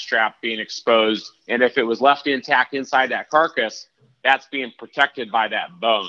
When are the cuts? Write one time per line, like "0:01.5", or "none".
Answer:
none